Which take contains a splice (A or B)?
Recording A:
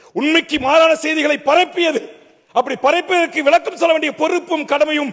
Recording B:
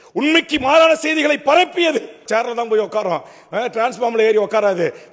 B